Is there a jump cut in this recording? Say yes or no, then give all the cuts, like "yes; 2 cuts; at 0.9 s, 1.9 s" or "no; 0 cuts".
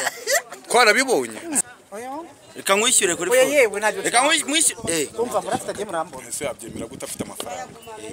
yes; 1 cut; at 1.6 s